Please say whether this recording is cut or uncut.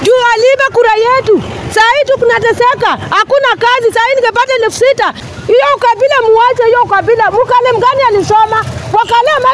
cut